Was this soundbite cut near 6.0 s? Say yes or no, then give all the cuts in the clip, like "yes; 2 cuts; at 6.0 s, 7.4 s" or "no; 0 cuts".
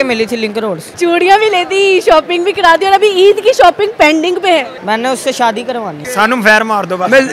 yes; 3 cuts; at 0.8 s, 4.7 s, 6.0 s